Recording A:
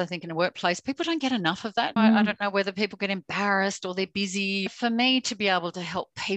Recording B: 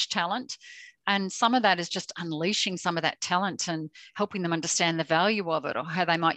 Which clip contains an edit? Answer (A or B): A